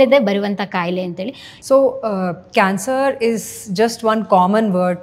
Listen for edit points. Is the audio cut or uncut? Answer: cut